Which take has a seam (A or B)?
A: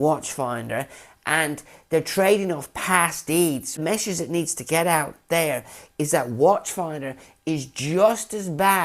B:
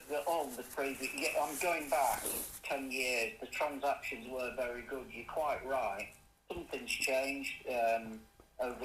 A